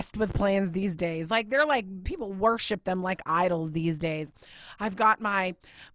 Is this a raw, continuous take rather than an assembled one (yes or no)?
no